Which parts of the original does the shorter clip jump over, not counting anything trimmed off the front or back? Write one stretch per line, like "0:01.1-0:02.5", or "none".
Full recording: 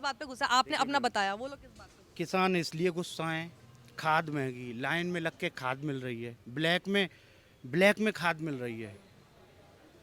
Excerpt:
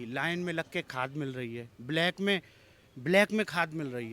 none